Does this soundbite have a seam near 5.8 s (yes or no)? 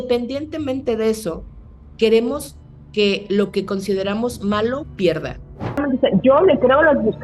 yes